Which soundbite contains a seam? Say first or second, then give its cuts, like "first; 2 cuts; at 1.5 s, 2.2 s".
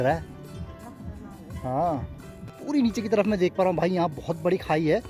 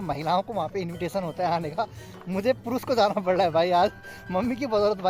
first; 1 cut; at 2.6 s